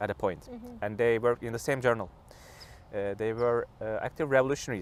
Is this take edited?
no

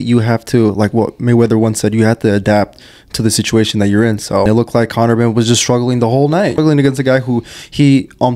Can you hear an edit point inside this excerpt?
yes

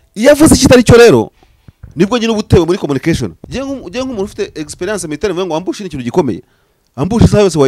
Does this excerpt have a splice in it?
yes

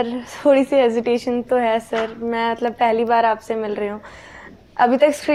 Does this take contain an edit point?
no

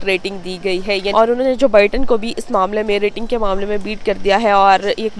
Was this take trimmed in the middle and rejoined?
yes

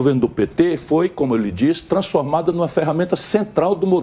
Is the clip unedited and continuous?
yes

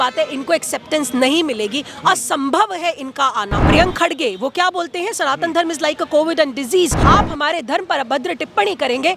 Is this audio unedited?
no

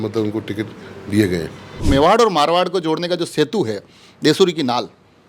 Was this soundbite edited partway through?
yes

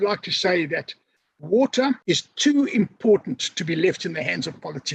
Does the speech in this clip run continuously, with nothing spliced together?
no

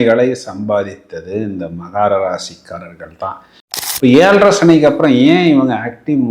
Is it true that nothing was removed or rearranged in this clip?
no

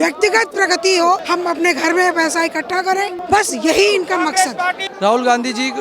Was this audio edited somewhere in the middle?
yes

